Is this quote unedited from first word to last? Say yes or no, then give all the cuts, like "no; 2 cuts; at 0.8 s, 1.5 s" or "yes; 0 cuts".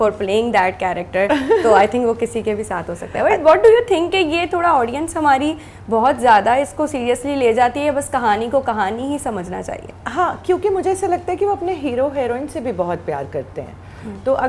yes; 0 cuts